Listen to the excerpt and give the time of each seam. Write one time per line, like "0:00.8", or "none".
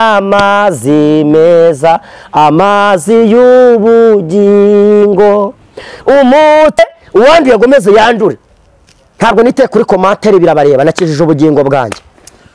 0:06.8